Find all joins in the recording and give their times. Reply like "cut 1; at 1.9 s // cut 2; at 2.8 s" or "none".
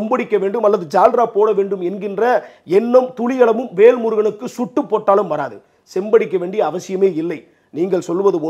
none